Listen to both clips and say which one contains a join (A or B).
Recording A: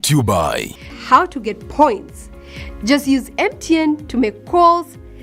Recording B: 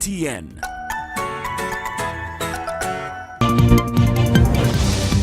B